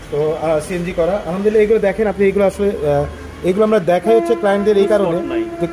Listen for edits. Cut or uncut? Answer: uncut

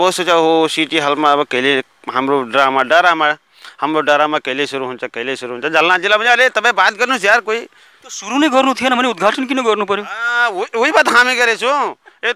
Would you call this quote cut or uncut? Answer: uncut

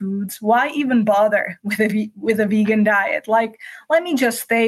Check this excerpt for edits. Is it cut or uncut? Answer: uncut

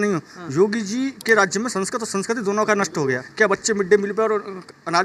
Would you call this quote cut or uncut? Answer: cut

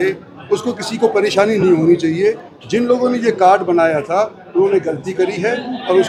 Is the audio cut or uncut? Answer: uncut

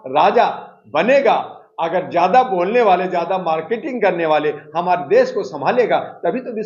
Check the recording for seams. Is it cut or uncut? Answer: uncut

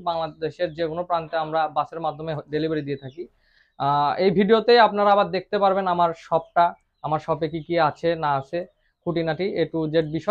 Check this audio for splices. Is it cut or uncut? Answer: uncut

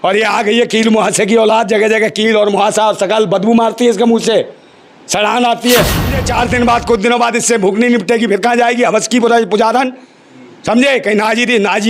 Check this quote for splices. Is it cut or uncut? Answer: cut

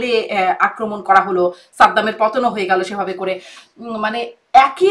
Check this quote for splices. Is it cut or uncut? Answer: uncut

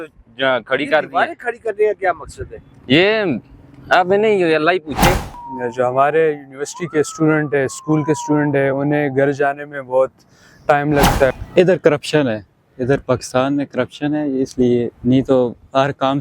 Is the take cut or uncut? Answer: cut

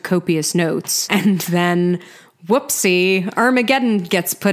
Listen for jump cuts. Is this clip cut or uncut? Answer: uncut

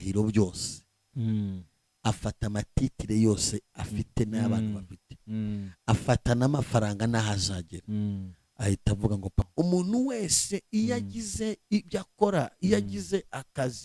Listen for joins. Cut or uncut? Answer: cut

